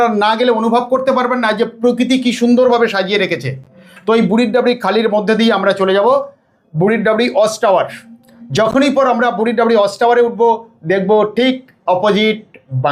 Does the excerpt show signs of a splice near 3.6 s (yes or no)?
no